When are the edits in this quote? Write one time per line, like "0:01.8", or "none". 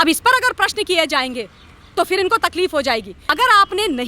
0:03.2